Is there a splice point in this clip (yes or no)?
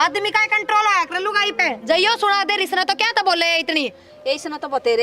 no